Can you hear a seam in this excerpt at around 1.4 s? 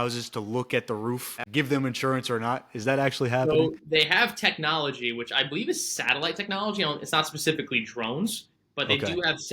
yes; 1 cut; at 1.4 s

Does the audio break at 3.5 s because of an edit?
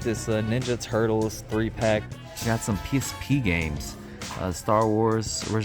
no; 1 cut; at 2.1 s

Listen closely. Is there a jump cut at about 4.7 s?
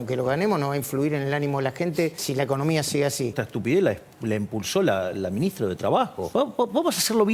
no; 3 cuts; at 2.2 s, 3.4 s, 6.2 s

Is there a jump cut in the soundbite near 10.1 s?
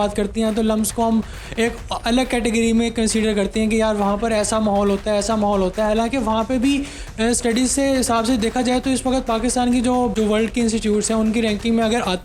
yes; 1 cut; at 10.1 s

